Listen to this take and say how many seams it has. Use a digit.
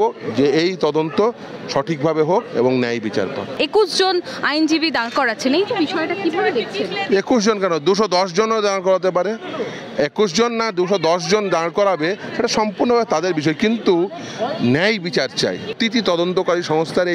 2